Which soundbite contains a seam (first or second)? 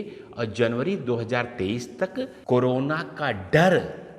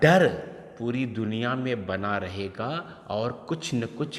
first